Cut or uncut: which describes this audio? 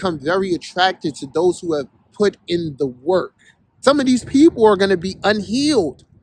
cut